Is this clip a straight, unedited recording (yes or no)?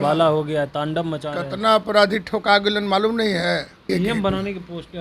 no